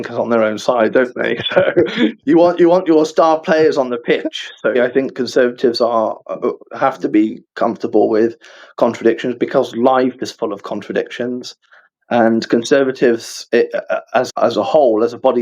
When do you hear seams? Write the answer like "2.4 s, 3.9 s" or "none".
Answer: 4.8 s, 14.3 s

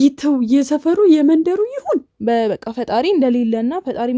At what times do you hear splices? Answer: 2.1 s

